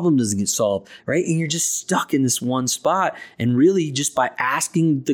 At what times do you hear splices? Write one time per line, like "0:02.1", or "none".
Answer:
0:00.9